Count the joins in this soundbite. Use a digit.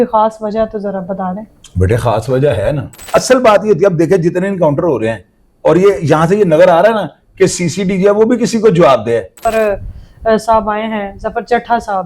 2